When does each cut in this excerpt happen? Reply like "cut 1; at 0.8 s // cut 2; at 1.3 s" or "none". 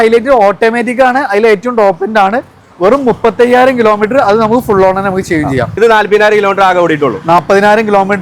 cut 1; at 5.7 s